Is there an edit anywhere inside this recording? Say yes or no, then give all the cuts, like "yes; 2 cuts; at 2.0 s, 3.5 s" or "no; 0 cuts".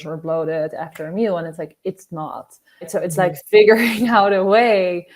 yes; 1 cut; at 2.9 s